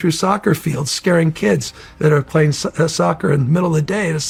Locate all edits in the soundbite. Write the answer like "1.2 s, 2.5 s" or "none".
none